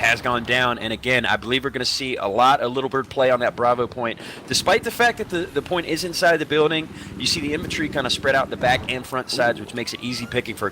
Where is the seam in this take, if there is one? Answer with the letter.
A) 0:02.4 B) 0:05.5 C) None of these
A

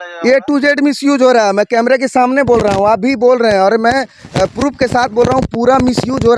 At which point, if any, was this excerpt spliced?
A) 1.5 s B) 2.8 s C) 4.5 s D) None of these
D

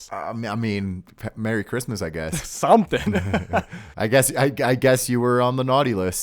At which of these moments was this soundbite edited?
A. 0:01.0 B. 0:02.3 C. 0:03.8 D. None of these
B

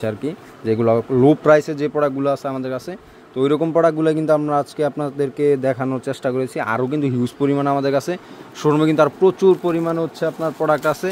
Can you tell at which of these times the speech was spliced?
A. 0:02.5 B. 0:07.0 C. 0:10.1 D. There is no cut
D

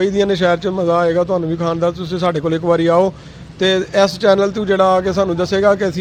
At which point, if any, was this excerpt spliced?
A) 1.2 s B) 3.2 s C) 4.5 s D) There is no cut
D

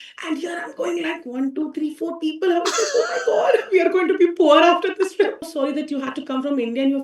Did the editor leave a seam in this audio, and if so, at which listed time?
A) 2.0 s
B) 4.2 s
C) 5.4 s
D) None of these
C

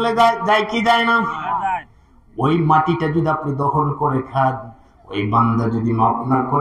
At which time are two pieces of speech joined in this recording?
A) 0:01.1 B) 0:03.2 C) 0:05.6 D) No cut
D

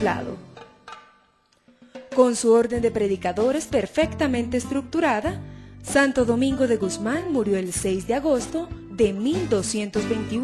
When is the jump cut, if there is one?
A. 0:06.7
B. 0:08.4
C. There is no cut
A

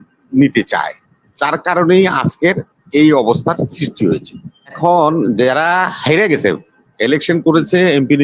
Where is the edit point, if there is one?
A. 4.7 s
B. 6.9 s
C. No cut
A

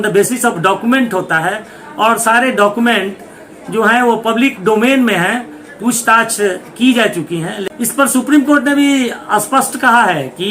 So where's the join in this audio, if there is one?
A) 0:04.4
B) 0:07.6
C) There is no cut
B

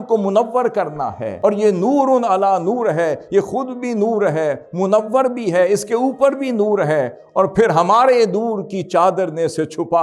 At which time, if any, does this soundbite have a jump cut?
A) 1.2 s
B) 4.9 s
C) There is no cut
A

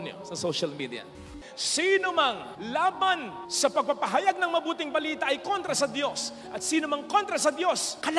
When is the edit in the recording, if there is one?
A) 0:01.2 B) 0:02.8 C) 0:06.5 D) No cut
A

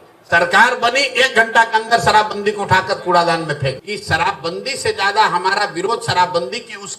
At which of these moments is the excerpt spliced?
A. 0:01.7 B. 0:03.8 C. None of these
B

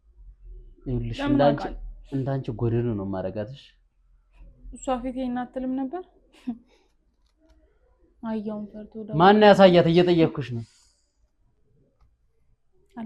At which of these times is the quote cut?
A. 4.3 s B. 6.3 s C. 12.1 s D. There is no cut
D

